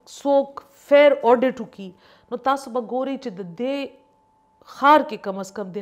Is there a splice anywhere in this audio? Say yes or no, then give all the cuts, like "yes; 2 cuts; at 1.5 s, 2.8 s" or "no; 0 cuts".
no; 0 cuts